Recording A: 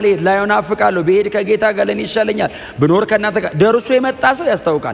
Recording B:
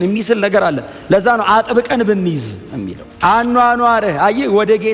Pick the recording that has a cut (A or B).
B